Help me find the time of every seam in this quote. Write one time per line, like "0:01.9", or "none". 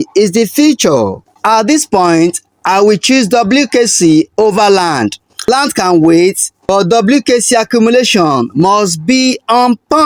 0:01.4
0:05.5